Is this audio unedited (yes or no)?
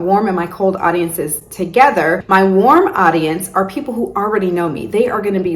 no